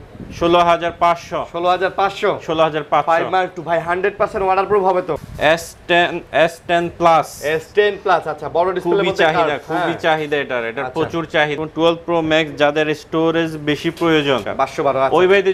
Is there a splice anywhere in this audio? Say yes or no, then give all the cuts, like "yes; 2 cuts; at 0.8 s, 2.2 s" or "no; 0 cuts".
yes; 3 cuts; at 5.2 s, 11.5 s, 14.5 s